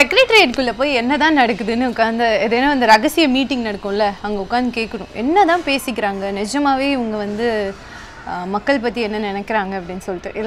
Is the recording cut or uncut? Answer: uncut